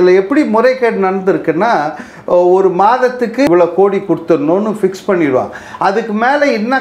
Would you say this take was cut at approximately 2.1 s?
no; 1 cut; at 3.5 s

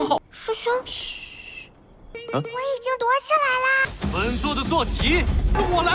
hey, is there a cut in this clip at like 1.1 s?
no; 1 cut; at 3.9 s

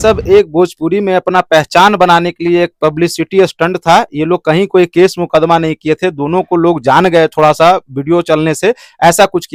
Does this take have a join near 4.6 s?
no; 0 cuts

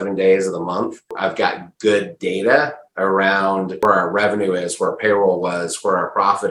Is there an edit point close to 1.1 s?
yes; 2 cuts; at 1.1 s, 3.8 s

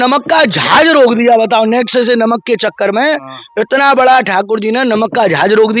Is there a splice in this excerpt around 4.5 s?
no; 0 cuts

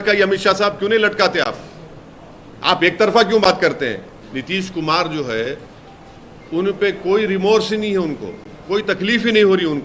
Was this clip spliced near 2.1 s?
no; 1 cut; at 4.2 s

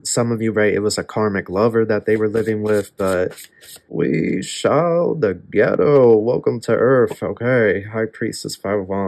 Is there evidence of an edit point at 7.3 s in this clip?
no; 1 cut; at 3.9 s

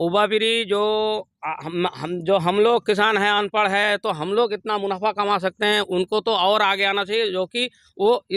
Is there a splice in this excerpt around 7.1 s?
no; 0 cuts

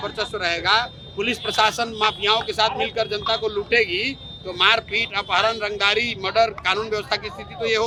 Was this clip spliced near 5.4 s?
no; 0 cuts

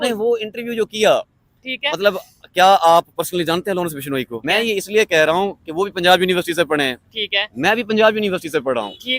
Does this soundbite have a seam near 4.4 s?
yes; 1 cut; at 4.4 s

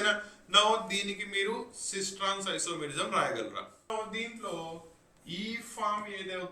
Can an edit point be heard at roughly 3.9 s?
yes; 1 cut; at 3.9 s

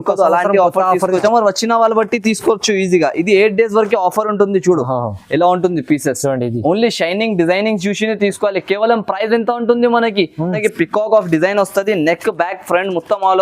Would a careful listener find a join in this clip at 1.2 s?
yes; 2 cuts; at 1.2 s, 10.6 s

